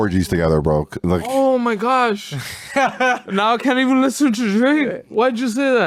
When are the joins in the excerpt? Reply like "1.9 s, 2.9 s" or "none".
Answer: none